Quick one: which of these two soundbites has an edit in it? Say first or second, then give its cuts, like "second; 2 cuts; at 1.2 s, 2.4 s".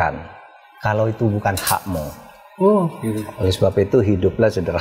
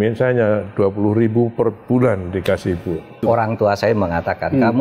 second; 1 cut; at 3.2 s